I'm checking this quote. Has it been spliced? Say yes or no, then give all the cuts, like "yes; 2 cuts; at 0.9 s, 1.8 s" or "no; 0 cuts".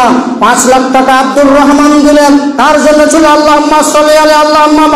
no; 0 cuts